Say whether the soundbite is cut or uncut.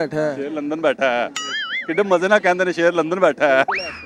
uncut